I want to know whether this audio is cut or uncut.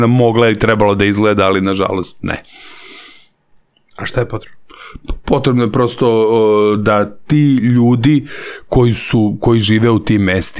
uncut